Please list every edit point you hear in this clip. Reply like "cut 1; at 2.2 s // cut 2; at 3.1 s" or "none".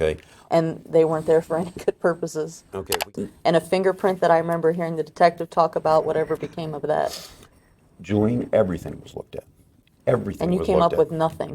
cut 1; at 3.1 s